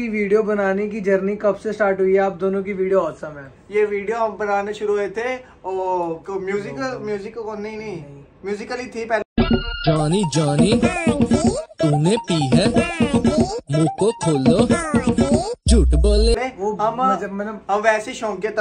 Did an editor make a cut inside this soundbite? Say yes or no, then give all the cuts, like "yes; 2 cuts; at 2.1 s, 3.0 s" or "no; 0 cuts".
no; 0 cuts